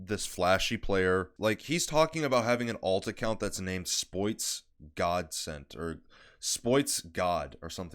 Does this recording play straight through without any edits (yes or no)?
no